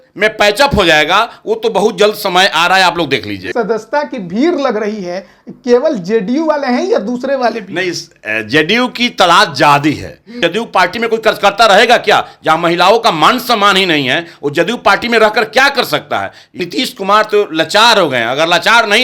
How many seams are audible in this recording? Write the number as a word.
three